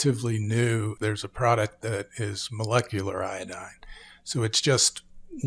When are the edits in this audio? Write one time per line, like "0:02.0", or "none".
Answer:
0:00.9